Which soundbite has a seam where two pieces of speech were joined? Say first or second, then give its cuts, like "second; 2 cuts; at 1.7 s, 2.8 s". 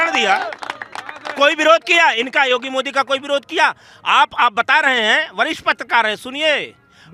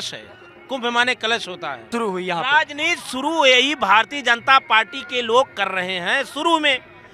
second; 1 cut; at 1.9 s